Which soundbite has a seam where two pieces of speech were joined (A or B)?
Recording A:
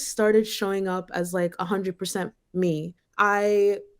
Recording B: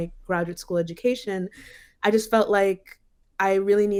A